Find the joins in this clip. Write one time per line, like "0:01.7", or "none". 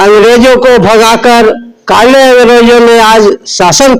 none